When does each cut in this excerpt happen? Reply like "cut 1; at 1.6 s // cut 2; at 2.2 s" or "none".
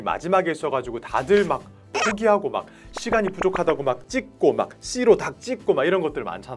none